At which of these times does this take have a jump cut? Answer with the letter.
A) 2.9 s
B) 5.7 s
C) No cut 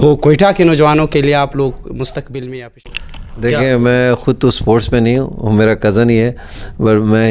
A